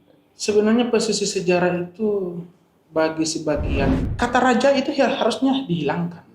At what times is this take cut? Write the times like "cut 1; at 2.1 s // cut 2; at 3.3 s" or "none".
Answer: cut 1; at 4.0 s